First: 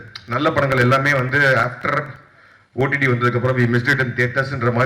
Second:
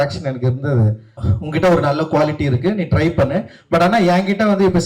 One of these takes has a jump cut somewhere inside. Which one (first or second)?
second